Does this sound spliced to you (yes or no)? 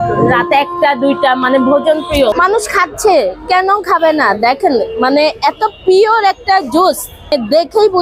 yes